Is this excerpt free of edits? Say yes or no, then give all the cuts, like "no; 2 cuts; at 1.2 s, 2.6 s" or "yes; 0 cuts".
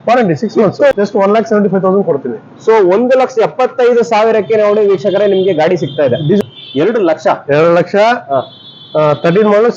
no; 2 cuts; at 0.9 s, 6.4 s